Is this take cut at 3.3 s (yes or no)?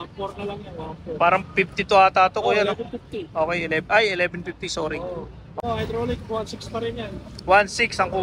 no